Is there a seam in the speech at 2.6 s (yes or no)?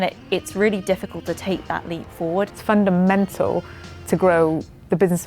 yes